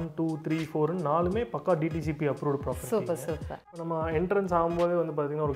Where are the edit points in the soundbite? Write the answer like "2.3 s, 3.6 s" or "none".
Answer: 3.7 s